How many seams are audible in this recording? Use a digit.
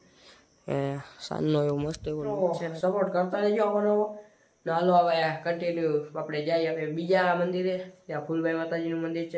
1